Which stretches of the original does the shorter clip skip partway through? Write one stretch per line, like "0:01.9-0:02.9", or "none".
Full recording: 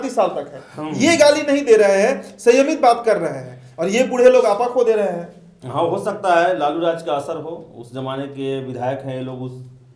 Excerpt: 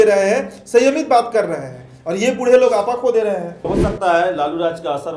0:05.4-0:05.9